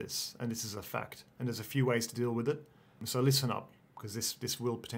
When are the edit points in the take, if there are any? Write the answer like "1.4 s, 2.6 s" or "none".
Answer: 3.0 s